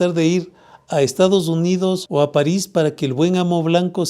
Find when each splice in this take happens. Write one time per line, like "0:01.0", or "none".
0:02.0